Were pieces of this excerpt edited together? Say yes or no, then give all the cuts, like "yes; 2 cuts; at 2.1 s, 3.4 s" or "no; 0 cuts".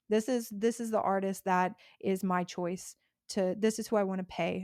no; 0 cuts